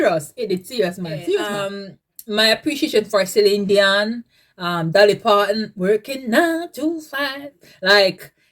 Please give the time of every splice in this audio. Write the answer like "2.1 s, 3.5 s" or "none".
1.6 s